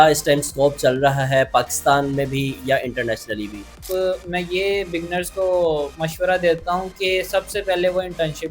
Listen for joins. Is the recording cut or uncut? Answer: cut